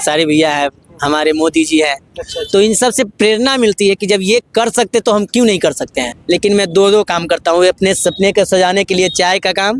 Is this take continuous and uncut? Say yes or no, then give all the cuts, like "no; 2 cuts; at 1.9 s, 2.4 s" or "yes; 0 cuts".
no; 1 cut; at 6.1 s